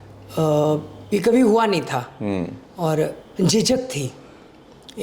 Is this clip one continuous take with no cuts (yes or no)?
yes